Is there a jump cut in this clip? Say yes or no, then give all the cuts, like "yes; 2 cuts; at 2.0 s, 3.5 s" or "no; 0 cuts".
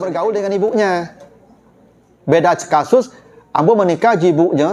no; 0 cuts